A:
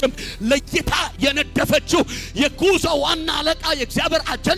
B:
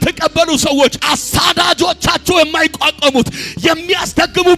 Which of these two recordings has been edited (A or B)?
B